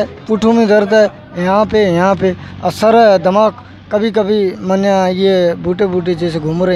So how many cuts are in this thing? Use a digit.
0